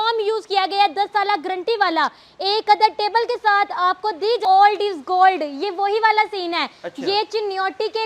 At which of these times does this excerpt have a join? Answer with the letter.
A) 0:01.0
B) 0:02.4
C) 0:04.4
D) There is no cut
C